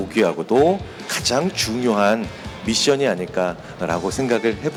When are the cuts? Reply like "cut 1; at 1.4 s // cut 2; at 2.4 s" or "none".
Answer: none